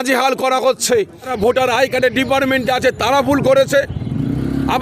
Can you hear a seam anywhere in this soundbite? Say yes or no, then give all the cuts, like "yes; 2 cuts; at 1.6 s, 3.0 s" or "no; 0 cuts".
yes; 1 cut; at 1.3 s